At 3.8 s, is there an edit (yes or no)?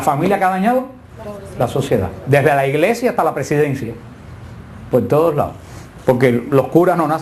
yes